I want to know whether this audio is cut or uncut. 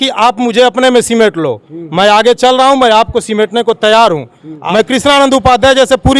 cut